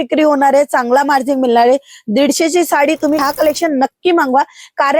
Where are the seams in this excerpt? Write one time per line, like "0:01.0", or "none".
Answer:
0:03.2